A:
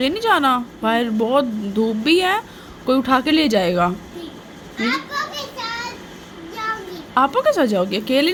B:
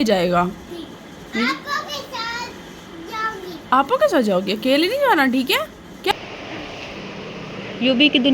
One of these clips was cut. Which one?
B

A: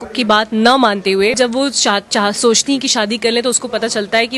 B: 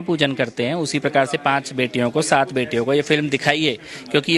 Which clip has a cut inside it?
A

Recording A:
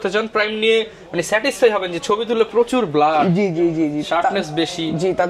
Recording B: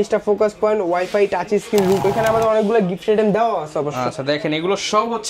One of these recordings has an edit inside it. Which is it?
B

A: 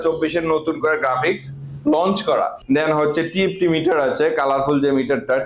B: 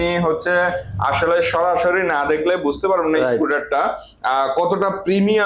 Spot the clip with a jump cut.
A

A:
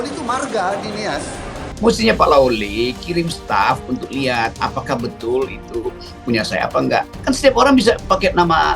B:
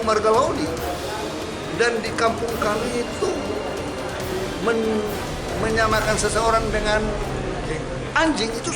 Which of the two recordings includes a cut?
A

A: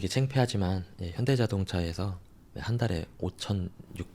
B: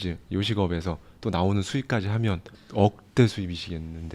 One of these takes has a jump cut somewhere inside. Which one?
B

